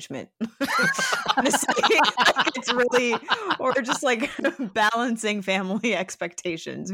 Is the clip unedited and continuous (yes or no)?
yes